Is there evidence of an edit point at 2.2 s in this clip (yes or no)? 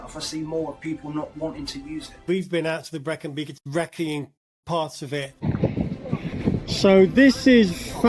yes